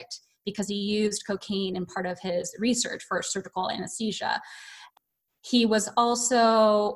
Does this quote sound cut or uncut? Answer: cut